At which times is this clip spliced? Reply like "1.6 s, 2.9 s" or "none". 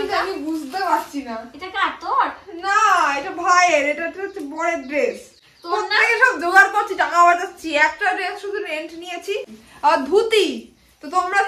9.6 s